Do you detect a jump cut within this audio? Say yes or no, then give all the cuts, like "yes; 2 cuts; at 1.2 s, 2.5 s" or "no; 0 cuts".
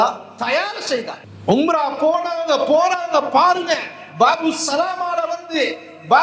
yes; 1 cut; at 1.2 s